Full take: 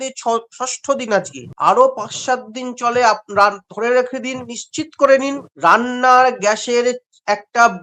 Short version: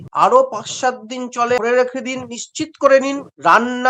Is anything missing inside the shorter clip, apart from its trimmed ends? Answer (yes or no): yes